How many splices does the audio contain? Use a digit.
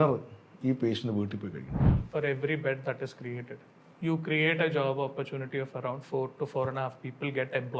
1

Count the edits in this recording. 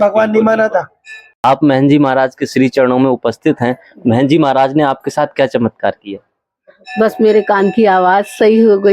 1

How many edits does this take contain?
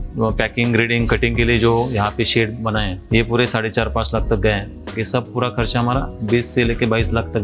2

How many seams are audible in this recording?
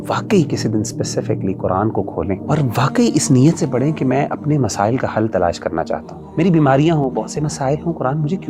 2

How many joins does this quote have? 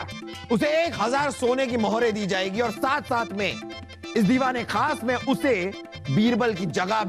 0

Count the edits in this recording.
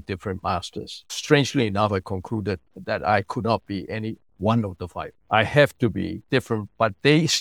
2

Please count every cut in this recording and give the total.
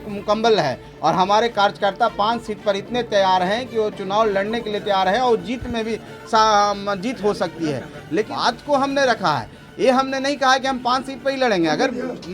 1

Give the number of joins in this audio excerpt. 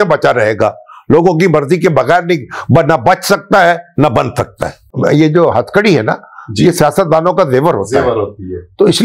1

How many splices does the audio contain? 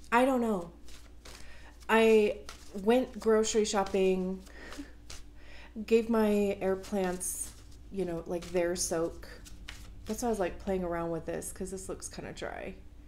0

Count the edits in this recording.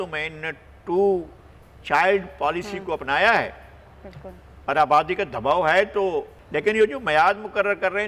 0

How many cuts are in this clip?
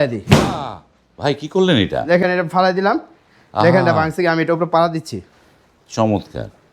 0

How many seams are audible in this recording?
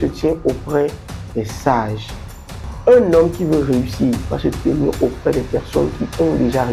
0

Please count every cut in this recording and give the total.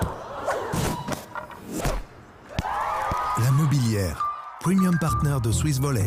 0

